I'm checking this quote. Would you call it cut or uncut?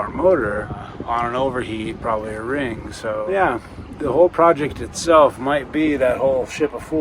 cut